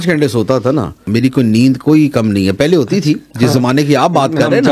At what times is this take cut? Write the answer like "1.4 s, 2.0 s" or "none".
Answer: 1.0 s